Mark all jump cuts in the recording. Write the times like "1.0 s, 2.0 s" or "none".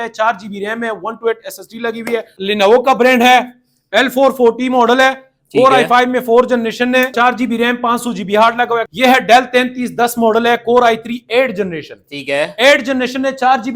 2.3 s, 7.1 s, 8.8 s